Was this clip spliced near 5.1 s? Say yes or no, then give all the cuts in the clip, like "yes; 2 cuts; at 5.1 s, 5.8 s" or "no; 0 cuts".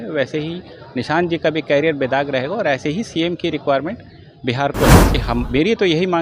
yes; 1 cut; at 5.1 s